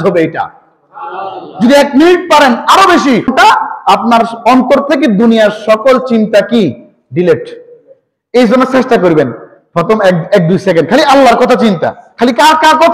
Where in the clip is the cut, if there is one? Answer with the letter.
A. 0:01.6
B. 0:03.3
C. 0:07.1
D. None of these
B